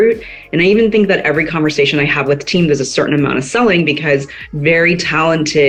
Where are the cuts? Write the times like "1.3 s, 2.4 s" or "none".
none